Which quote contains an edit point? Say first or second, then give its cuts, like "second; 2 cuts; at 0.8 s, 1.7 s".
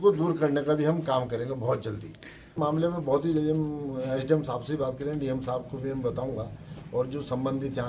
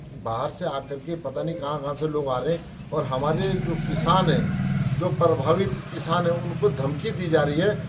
first; 1 cut; at 2.5 s